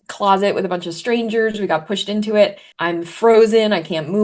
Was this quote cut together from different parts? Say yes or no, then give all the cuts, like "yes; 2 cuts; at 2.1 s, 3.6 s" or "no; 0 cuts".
yes; 1 cut; at 2.7 s